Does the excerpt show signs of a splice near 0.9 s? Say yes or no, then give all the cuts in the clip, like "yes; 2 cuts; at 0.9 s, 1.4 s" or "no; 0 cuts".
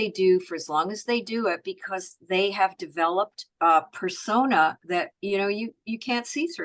no; 1 cut; at 3.5 s